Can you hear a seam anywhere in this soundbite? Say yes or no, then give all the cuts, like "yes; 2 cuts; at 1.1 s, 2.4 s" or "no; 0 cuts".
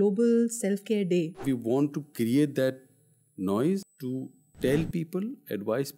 yes; 2 cuts; at 1.4 s, 3.8 s